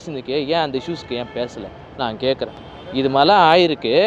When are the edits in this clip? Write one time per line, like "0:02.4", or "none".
none